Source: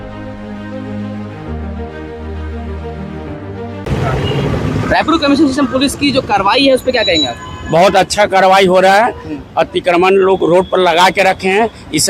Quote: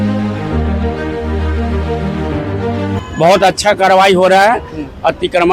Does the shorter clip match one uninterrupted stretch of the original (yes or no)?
no